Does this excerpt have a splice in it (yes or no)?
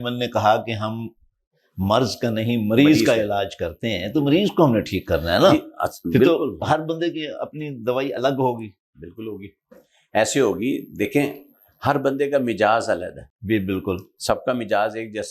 no